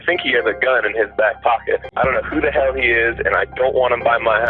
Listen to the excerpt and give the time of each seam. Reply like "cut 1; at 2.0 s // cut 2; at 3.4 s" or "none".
cut 1; at 1.9 s